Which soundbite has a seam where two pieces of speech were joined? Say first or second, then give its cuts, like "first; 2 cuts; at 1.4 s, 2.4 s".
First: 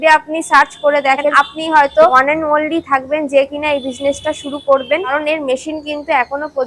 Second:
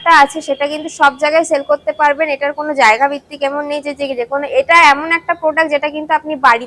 first; 3 cuts; at 1.3 s, 2.2 s, 5.2 s